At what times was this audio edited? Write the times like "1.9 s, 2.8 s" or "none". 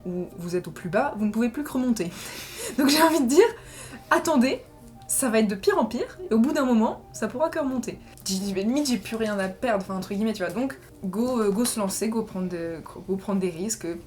8.1 s, 10.9 s